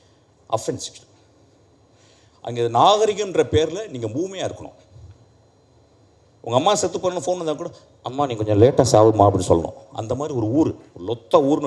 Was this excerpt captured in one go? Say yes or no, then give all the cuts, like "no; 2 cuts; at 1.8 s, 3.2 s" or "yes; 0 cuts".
yes; 0 cuts